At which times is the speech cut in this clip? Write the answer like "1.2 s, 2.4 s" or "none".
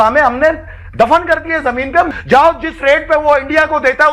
2.1 s